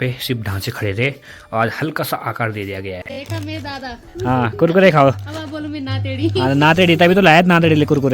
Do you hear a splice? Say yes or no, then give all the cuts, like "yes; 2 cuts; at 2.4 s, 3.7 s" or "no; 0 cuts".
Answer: yes; 1 cut; at 3.2 s